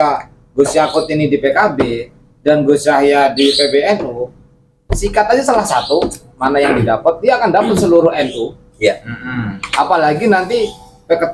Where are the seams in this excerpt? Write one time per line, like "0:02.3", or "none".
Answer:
none

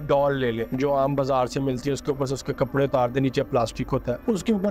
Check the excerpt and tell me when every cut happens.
none

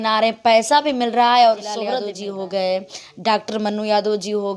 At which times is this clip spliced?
0:02.0

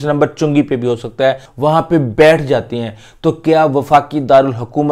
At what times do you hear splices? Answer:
0:01.5

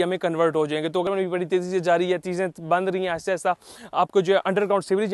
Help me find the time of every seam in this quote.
0:01.0

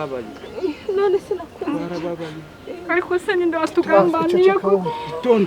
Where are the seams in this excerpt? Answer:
none

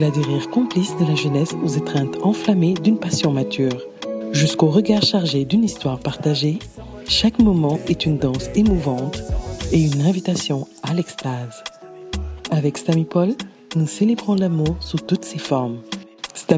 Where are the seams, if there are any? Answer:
none

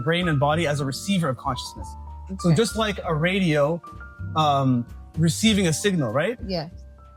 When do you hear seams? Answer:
none

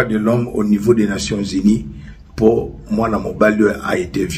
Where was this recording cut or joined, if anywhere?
none

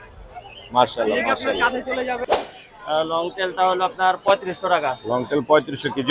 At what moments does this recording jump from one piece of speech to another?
0:02.2

